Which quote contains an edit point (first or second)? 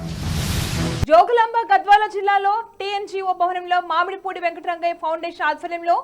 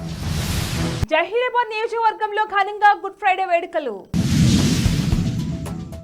first